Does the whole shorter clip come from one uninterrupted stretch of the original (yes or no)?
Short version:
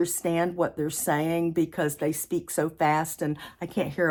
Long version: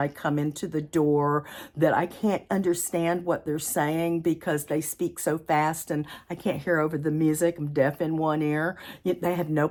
yes